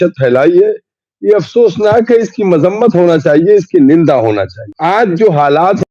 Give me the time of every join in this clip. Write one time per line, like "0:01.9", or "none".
0:04.6